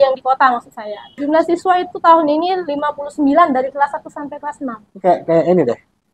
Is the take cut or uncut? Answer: cut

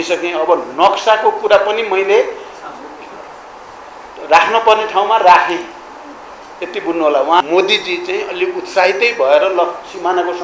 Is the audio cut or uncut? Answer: cut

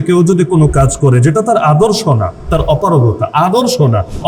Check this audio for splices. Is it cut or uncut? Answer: uncut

